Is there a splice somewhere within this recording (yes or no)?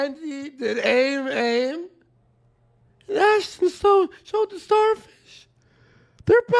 no